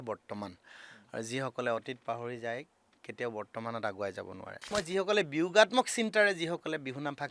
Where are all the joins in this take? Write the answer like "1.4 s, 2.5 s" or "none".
4.7 s